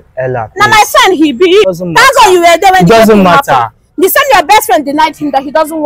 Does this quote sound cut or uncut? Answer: cut